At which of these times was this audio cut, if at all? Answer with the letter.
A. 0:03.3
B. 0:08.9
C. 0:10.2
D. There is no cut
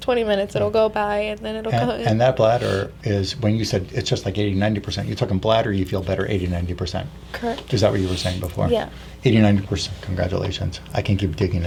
D